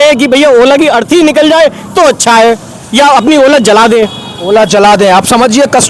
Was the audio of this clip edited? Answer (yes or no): no